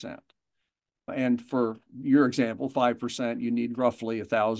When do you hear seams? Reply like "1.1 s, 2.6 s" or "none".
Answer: 1.1 s